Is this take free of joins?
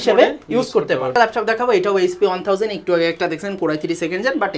no; 1 cut; at 1.1 s

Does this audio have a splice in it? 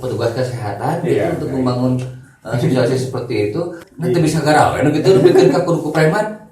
yes; 1 cut; at 3.9 s

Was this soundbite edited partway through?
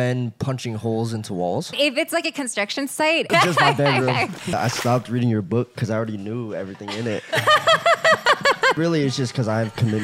yes; 4 cuts; at 1.7 s, 3.3 s, 4.5 s, 8.8 s

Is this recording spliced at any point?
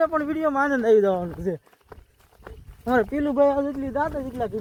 no; 0 cuts

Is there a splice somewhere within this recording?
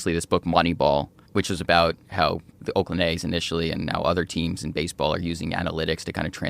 yes; 2 cuts; at 1.2 s, 2.6 s

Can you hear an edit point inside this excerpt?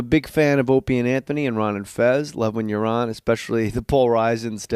yes; 1 cut; at 2.6 s

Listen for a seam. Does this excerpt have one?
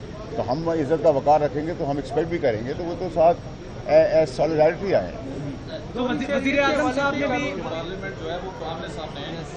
yes; 1 cut; at 7.5 s

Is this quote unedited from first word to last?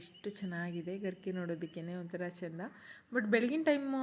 yes; 0 cuts

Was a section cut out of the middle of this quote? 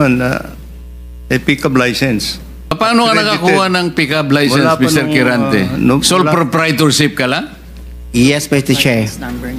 yes; 1 cut; at 2.7 s

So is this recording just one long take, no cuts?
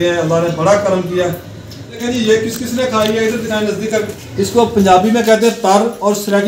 no; 2 cuts; at 1.4 s, 4.2 s

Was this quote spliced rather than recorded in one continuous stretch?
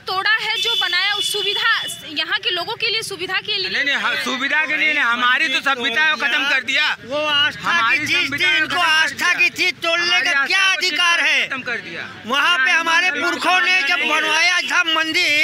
no; 0 cuts

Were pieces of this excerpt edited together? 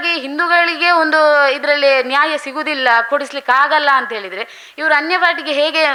no; 0 cuts

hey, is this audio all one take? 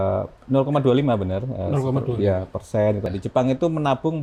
no; 1 cut; at 3.1 s

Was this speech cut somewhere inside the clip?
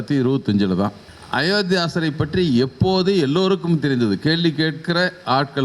yes; 1 cut; at 1.0 s

